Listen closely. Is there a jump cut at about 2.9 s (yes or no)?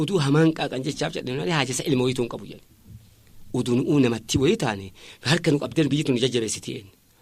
no